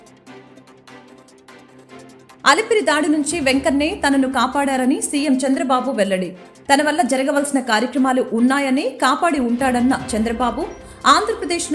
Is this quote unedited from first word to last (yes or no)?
no